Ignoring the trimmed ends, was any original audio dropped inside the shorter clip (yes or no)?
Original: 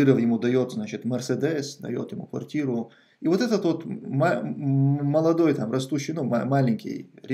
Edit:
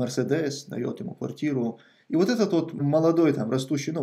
yes